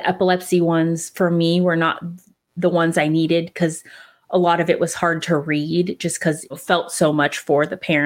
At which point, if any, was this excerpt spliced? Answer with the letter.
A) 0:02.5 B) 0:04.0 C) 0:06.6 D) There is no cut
C